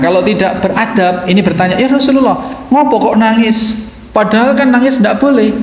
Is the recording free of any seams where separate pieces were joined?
yes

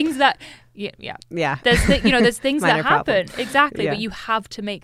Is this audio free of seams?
yes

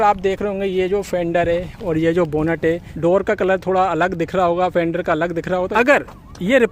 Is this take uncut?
no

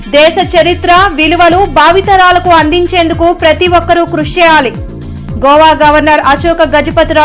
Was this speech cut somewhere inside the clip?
no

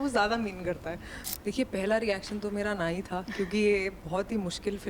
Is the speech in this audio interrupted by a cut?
yes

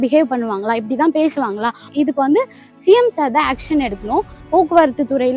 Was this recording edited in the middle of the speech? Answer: yes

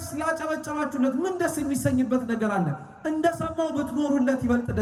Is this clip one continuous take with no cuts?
yes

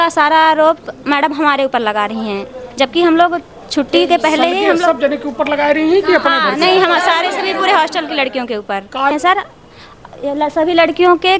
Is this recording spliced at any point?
yes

